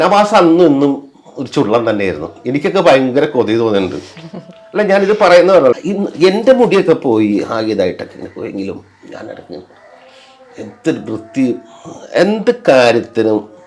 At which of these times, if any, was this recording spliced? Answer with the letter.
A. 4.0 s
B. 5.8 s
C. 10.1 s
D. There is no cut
B